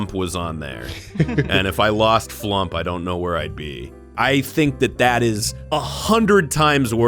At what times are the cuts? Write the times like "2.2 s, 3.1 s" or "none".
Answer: 4.1 s